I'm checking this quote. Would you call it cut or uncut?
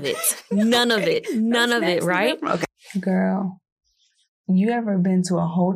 cut